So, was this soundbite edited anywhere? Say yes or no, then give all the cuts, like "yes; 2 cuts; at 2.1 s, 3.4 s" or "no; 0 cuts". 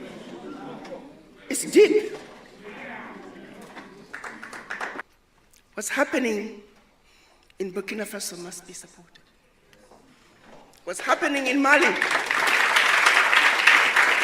yes; 1 cut; at 5.0 s